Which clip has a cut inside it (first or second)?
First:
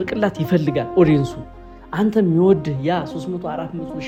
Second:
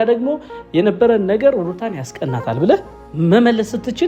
second